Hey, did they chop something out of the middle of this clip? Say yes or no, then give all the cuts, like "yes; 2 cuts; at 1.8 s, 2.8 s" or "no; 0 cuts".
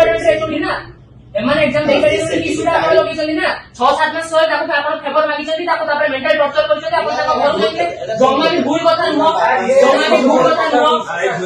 no; 0 cuts